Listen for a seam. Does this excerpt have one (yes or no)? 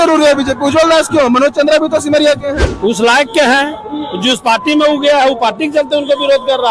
no